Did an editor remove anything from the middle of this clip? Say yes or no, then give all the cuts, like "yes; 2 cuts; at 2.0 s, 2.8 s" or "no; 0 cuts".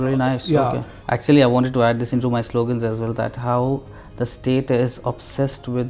yes; 1 cut; at 0.9 s